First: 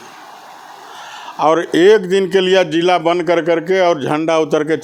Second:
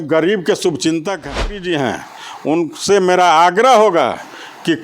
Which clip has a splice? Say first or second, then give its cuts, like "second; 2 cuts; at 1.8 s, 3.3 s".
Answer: second; 1 cut; at 1.6 s